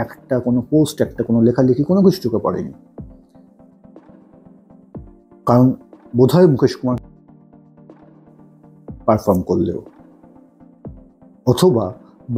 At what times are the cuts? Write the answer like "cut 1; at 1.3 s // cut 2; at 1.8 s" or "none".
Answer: cut 1; at 2.8 s // cut 2; at 5.2 s // cut 3; at 9.8 s // cut 4; at 11.4 s